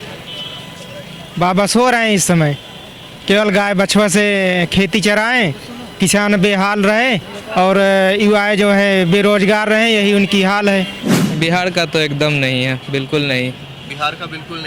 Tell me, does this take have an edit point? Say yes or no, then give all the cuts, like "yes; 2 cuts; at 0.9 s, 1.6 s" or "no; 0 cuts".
yes; 1 cut; at 11.2 s